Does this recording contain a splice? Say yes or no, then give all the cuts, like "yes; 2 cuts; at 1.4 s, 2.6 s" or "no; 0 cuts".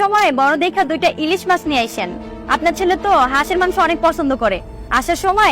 yes; 1 cut; at 2.4 s